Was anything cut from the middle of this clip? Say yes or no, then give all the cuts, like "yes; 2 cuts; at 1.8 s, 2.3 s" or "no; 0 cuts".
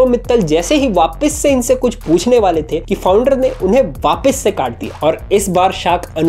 no; 0 cuts